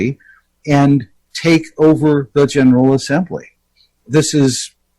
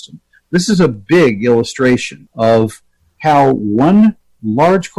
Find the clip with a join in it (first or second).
second